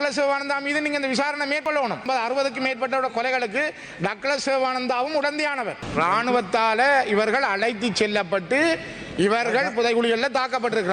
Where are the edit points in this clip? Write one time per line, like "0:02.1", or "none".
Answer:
0:01.8
0:05.8